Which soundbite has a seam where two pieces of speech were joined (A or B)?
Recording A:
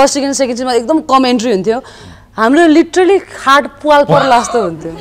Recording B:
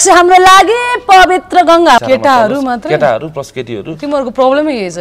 B